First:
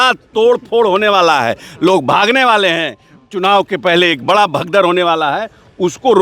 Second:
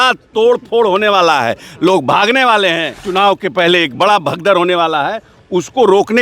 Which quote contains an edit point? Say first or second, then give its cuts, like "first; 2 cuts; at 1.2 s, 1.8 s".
second; 1 cut; at 2.9 s